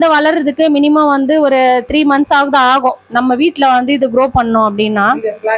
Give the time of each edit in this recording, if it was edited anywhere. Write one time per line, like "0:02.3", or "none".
none